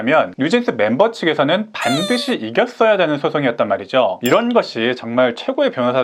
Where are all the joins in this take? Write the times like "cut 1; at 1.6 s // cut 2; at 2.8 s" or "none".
cut 1; at 4.2 s